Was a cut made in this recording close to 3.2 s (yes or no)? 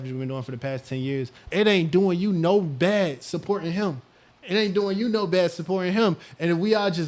no